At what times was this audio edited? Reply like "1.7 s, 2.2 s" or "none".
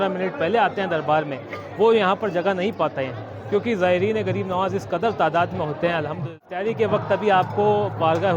6.2 s